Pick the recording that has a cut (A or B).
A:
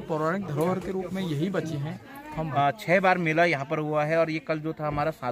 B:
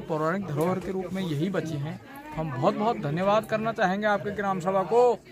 A